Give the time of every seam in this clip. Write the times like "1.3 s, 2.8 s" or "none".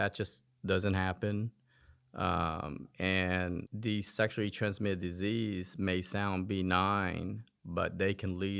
none